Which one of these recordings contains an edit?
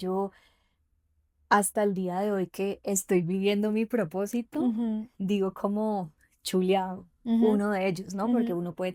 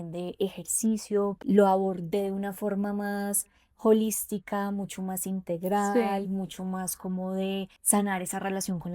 second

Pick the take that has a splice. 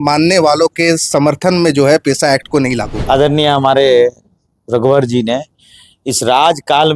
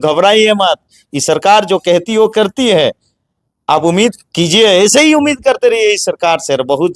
first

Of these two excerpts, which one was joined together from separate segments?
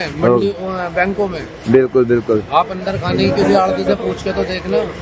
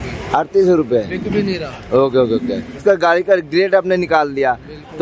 second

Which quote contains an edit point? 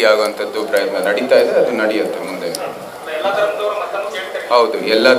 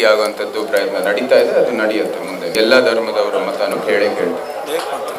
second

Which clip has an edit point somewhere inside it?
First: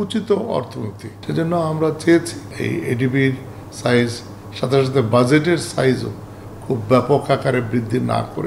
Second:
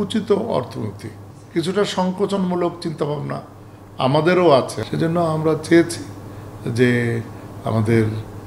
first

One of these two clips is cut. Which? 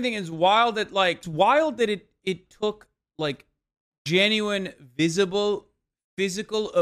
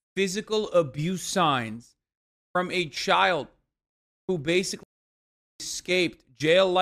first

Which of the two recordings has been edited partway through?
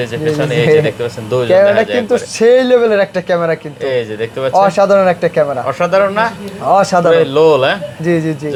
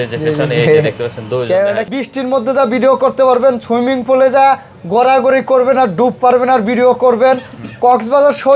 second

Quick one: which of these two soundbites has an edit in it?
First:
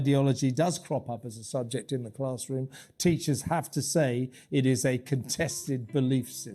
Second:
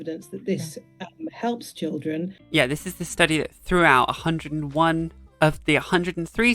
second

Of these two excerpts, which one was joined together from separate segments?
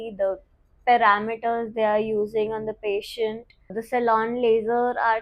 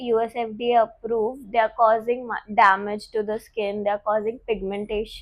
first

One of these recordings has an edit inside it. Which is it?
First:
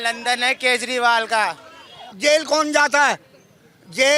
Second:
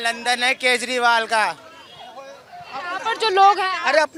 first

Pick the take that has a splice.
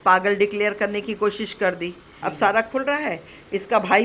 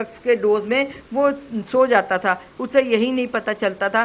first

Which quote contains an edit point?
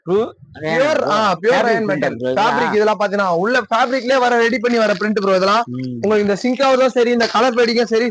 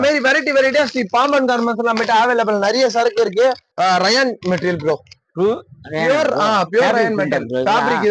second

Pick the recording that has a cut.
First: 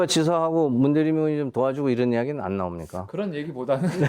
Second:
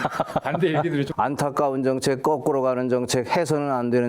second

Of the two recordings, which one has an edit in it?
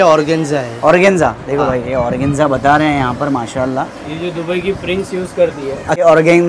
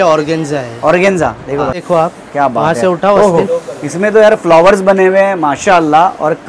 second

